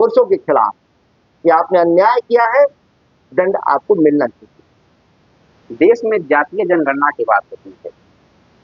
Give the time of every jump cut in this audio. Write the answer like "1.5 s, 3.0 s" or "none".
none